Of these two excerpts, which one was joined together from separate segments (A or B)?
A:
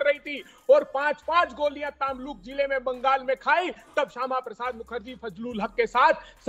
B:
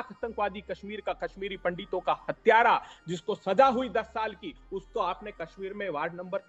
B